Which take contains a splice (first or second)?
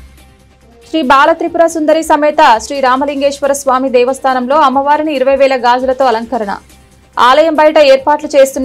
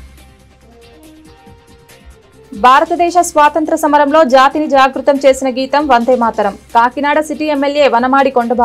first